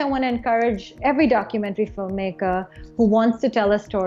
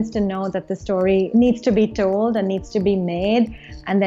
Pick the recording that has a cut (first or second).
first